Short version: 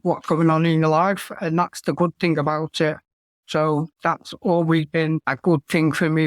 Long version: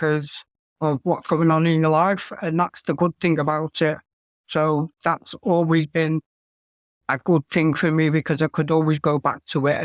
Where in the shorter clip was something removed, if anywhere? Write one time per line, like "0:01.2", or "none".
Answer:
0:05.3